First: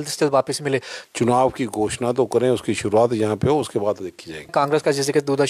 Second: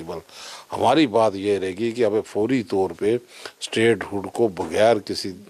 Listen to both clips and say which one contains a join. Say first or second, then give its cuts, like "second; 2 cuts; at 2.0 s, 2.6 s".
first; 2 cuts; at 0.9 s, 4.5 s